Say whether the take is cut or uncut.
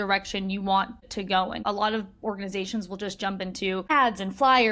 cut